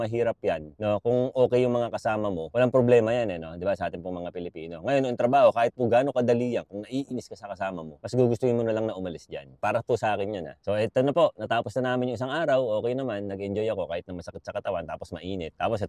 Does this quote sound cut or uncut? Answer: uncut